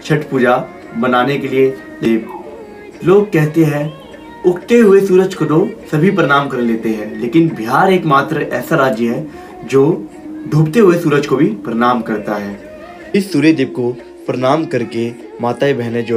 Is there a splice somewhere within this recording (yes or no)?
yes